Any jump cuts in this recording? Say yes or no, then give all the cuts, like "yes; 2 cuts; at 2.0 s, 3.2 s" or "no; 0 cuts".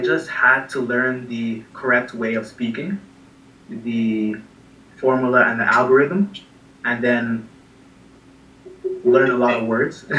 no; 0 cuts